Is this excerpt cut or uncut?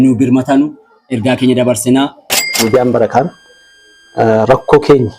cut